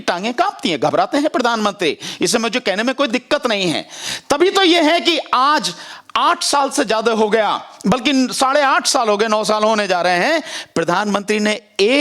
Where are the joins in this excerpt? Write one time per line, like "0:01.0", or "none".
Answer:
none